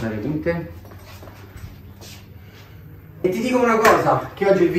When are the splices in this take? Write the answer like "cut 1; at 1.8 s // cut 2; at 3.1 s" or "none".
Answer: cut 1; at 3.2 s

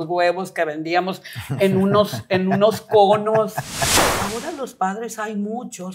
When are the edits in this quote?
cut 1; at 4.0 s

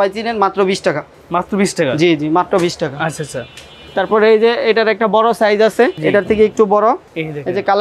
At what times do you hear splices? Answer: none

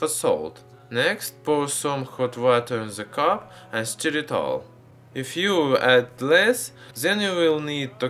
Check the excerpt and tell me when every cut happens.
cut 1; at 3.0 s

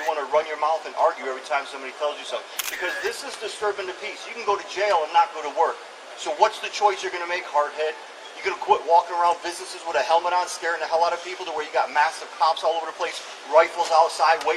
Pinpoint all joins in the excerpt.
none

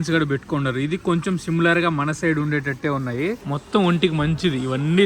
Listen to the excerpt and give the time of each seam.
cut 1; at 3.5 s

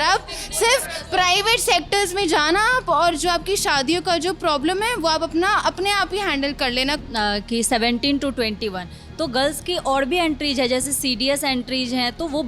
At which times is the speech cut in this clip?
cut 1; at 7.0 s

